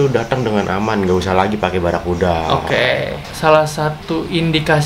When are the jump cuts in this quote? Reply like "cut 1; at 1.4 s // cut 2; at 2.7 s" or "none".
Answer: cut 1; at 3.2 s